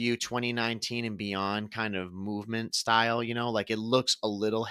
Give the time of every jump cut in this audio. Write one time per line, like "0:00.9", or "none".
none